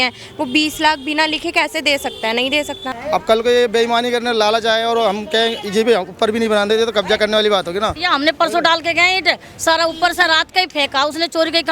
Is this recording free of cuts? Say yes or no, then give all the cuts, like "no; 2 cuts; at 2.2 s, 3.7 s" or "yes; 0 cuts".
no; 2 cuts; at 2.8 s, 8.0 s